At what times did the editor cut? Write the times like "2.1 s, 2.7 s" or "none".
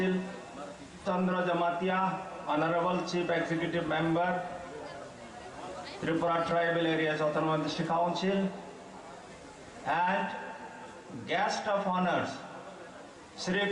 1.0 s